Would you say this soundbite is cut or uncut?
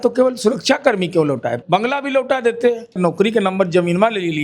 cut